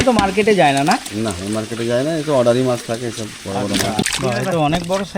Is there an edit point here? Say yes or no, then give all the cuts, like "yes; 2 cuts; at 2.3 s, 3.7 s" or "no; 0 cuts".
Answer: yes; 1 cut; at 4.1 s